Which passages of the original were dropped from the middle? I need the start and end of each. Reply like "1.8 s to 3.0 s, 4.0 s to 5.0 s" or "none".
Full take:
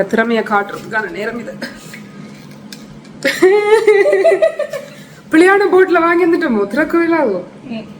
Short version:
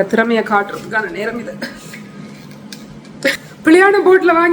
3.2 s to 4.9 s